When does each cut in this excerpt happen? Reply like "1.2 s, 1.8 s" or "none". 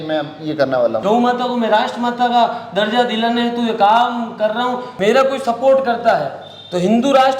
1.0 s, 4.9 s